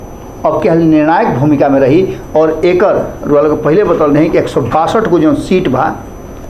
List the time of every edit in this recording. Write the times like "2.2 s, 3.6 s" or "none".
none